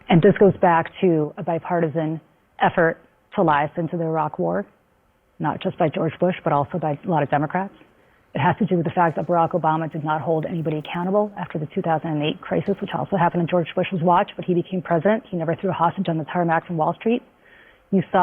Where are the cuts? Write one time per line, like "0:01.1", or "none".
0:02.1
0:15.0